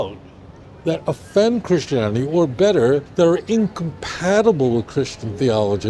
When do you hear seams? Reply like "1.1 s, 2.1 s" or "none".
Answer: 3.1 s